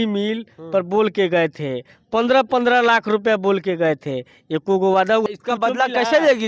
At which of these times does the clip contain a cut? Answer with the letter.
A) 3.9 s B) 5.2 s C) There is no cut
B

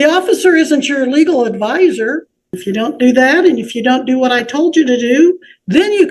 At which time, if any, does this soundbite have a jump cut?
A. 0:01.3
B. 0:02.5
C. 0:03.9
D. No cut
B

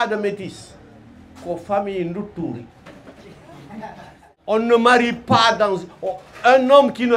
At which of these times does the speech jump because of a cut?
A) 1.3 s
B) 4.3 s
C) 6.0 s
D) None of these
B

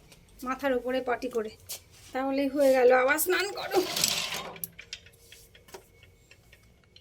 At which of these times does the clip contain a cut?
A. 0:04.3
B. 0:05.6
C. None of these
C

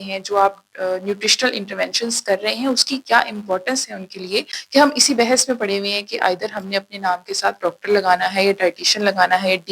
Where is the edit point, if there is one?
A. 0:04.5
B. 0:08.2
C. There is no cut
A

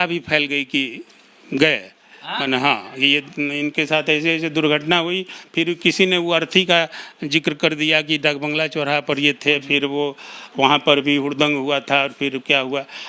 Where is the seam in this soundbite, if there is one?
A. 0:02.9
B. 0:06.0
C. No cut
C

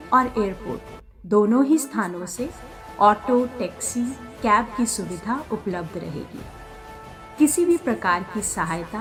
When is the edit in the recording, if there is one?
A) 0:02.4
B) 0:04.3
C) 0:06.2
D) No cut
D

